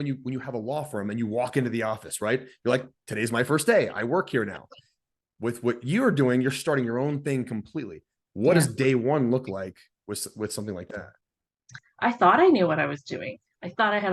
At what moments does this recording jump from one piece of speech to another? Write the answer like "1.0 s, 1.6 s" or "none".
11.8 s